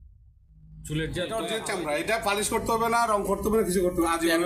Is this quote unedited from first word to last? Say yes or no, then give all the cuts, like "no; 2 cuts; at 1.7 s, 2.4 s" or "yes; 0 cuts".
no; 1 cut; at 1.5 s